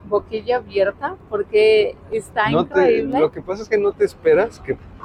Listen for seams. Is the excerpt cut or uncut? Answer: uncut